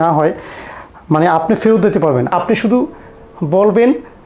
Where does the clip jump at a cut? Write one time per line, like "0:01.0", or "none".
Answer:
0:02.3